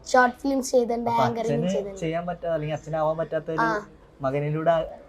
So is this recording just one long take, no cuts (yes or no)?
yes